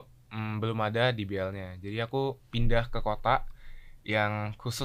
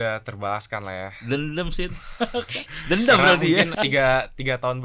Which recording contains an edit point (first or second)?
second